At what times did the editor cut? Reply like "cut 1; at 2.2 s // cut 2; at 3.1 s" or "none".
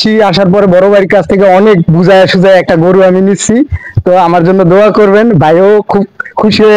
none

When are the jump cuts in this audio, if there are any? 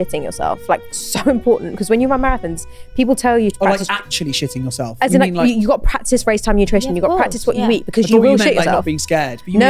none

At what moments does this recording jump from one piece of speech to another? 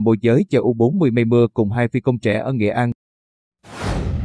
cut 1; at 3.1 s

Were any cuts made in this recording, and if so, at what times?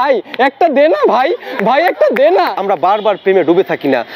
cut 1; at 2.5 s

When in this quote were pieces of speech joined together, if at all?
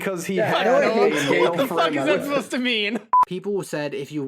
cut 1; at 3.1 s

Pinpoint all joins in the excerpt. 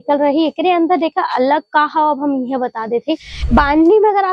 cut 1; at 3.3 s

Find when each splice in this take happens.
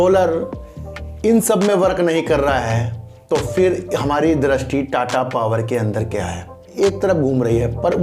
cut 1; at 6.7 s

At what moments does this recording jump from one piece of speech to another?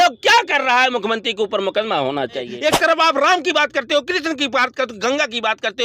cut 1; at 2.5 s

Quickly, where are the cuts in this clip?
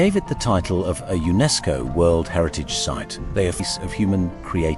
cut 1; at 3.6 s

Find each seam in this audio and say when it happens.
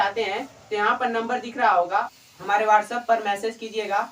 cut 1; at 2.2 s

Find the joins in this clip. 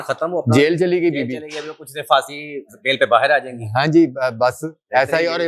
none

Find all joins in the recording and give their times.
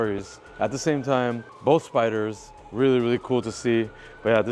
cut 1; at 1.5 s

